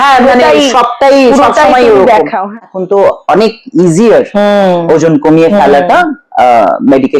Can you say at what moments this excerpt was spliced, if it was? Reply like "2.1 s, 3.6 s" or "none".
2.5 s